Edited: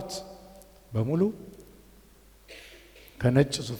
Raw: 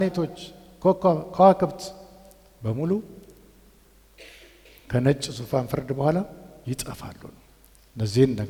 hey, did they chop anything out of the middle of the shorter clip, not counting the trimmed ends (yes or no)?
no